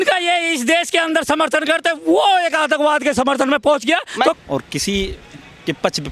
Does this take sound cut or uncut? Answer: cut